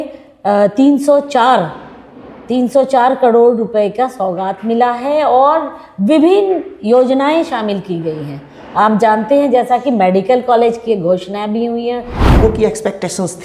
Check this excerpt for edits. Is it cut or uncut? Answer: cut